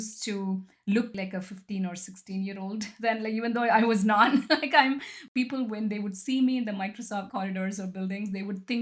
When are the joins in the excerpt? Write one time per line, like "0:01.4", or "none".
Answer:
0:01.1
0:05.2
0:07.3